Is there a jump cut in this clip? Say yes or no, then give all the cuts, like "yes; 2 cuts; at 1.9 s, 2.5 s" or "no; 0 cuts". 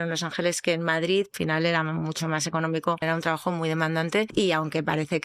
yes; 3 cuts; at 1.3 s, 3.0 s, 4.3 s